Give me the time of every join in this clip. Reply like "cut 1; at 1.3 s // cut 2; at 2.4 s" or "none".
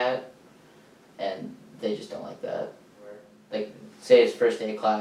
cut 1; at 3.4 s